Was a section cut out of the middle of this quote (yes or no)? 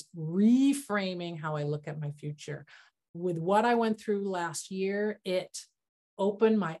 yes